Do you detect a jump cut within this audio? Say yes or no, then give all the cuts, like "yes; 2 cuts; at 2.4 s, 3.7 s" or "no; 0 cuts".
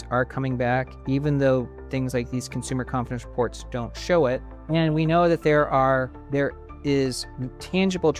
yes; 2 cuts; at 4.5 s, 6.2 s